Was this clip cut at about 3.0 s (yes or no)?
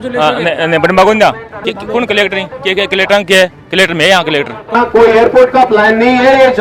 no